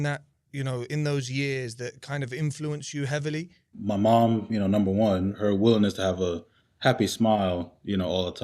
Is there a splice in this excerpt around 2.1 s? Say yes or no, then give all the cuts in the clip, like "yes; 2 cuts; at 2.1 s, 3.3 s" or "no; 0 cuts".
no; 2 cuts; at 3.7 s, 5.3 s